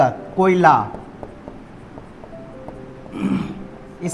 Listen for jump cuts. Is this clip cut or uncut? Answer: uncut